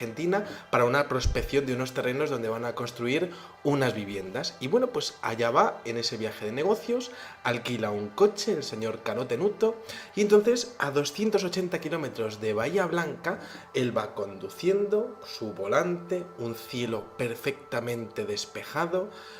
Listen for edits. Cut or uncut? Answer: cut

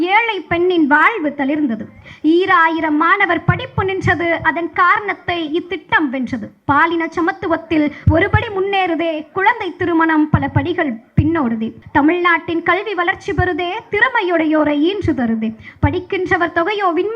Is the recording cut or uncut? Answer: cut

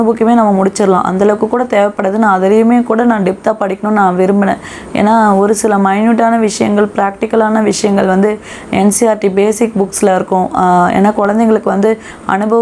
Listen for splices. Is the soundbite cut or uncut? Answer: uncut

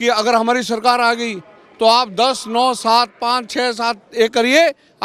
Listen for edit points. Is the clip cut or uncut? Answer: uncut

